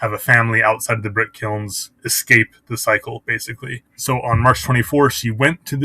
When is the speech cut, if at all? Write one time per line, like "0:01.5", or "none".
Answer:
0:03.9